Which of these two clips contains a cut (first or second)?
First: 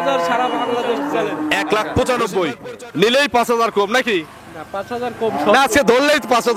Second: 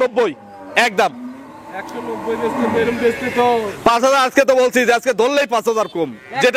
first